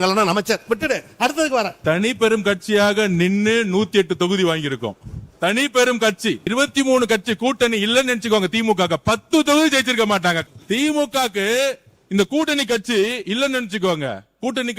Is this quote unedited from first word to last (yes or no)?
no